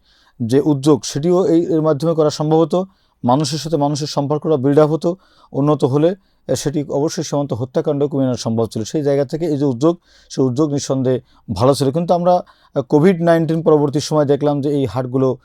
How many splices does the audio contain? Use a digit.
0